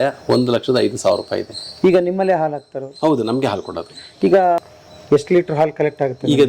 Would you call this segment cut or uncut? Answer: cut